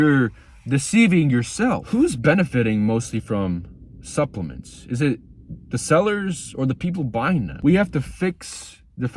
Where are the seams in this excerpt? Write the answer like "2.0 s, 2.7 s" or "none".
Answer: 1.8 s, 7.5 s